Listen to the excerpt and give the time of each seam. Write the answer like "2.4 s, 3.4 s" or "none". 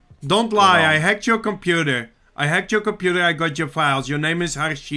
none